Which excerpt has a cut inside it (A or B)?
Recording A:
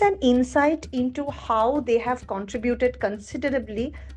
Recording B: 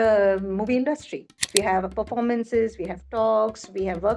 B